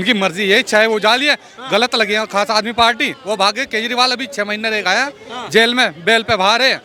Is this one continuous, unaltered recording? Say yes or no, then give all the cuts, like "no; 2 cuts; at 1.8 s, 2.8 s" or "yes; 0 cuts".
yes; 0 cuts